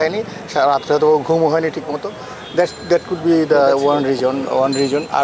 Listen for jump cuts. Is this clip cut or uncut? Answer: uncut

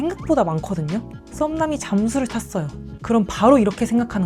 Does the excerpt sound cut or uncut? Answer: uncut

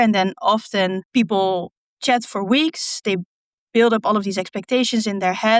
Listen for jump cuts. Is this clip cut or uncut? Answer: cut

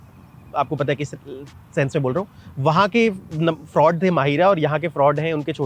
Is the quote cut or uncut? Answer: uncut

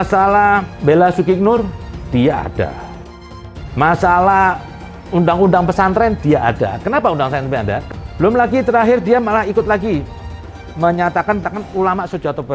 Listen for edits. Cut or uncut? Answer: cut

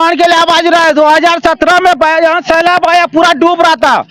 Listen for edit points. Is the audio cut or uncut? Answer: uncut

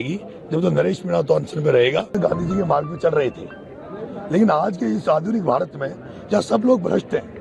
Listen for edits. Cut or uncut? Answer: cut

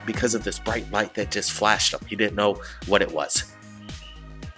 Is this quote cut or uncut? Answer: cut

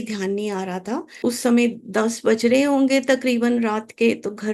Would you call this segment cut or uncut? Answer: cut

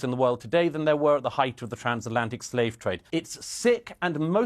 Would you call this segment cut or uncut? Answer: cut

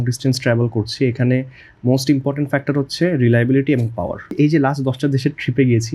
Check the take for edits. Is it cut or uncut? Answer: cut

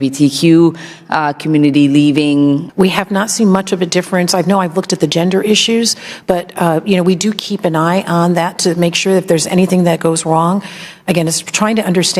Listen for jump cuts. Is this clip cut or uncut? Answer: cut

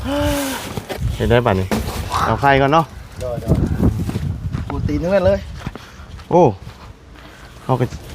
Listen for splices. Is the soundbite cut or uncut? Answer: cut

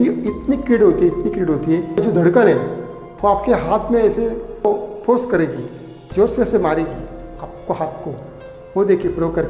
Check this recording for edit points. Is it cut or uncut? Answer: cut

